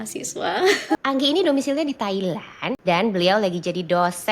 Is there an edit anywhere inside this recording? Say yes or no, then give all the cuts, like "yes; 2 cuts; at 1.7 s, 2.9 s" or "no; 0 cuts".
yes; 2 cuts; at 0.9 s, 2.7 s